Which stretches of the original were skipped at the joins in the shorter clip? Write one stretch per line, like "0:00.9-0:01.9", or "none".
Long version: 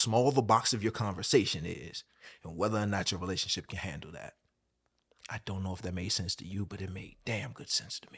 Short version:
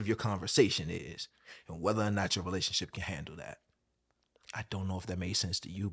none